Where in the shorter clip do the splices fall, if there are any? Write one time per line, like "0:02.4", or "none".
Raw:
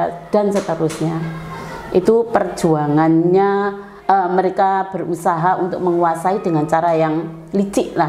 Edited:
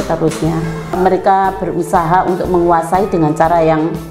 0:01.0